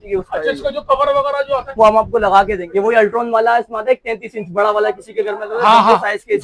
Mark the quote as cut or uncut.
cut